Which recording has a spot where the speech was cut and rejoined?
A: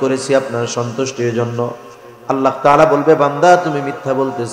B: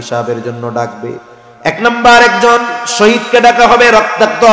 B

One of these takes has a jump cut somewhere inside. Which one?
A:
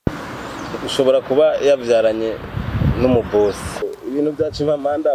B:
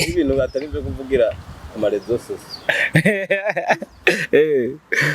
A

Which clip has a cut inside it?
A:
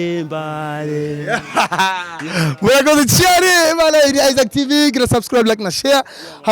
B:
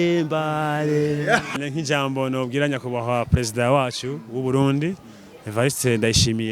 B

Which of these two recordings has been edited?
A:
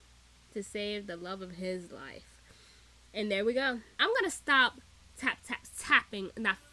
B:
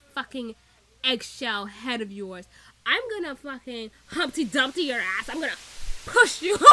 A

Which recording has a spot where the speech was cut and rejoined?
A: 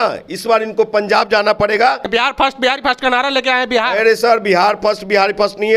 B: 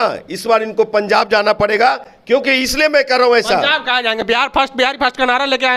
A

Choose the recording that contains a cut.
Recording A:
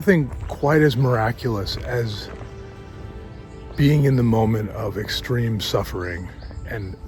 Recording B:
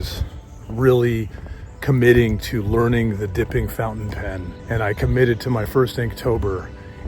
B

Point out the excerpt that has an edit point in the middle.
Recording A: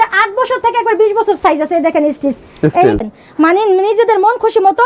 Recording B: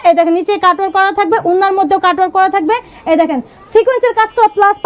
A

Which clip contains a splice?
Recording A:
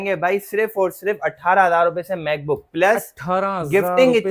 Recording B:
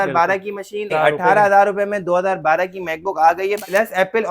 B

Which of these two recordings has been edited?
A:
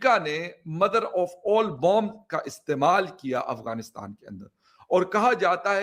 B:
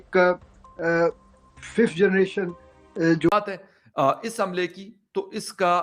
B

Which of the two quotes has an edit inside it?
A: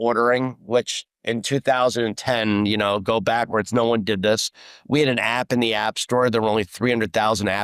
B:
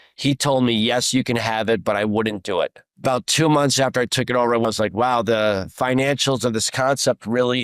B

